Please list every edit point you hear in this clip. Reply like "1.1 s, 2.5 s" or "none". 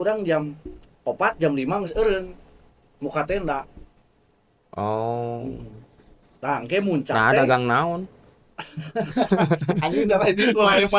none